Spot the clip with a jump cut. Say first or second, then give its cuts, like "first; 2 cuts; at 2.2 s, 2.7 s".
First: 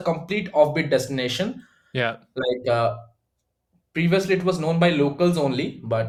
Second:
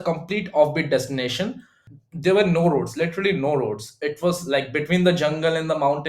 second; 1 cut; at 1.8 s